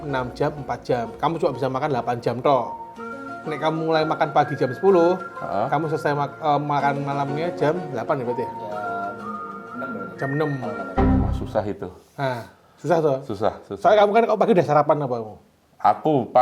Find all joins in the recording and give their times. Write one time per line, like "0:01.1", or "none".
none